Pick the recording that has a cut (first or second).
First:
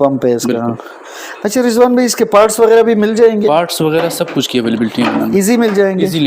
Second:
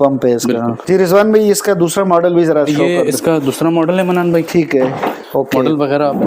second